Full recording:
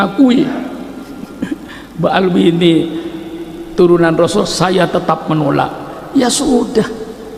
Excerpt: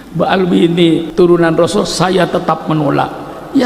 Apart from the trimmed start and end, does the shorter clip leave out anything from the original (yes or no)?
yes